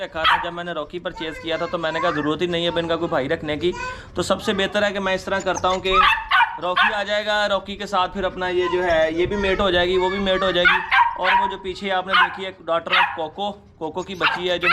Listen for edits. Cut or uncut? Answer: uncut